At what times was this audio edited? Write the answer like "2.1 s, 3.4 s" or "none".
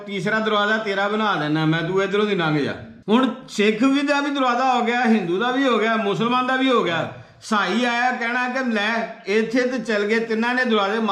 2.9 s